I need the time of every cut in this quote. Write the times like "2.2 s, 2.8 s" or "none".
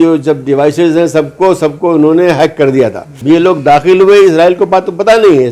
3.1 s